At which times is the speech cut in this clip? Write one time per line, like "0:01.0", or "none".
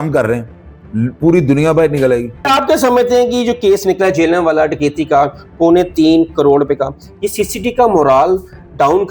0:02.5